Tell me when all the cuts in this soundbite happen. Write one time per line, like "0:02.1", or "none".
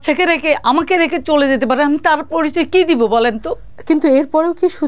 0:03.7